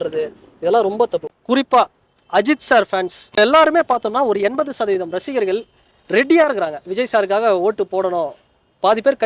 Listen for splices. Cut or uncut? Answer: cut